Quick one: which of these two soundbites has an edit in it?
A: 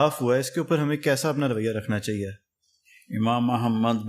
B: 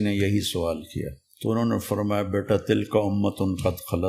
B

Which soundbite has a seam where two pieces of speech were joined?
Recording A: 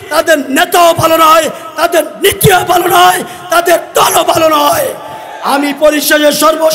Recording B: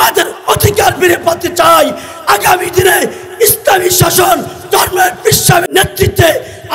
B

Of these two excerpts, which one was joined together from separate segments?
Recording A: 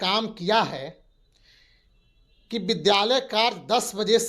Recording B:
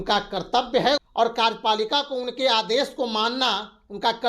B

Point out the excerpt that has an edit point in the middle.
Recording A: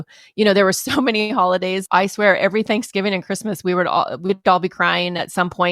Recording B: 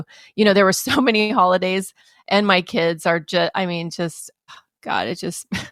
A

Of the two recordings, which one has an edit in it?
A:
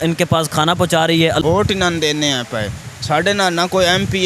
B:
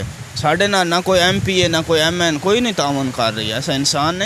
A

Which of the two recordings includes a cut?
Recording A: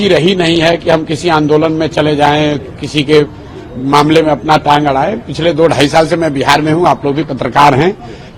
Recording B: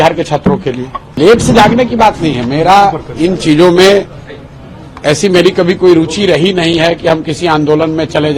B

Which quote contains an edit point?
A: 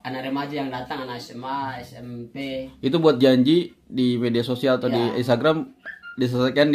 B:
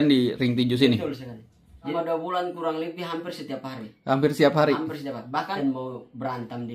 B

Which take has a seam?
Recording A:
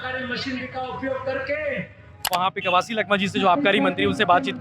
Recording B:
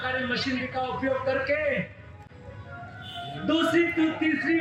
A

